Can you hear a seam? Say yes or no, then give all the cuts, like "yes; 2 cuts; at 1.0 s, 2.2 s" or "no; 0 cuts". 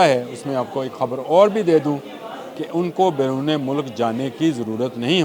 no; 0 cuts